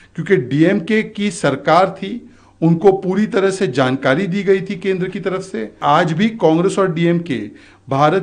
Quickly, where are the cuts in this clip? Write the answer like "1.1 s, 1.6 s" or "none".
5.7 s